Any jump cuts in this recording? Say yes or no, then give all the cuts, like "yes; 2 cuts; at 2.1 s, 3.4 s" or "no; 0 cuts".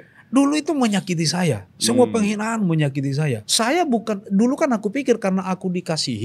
yes; 1 cut; at 3.5 s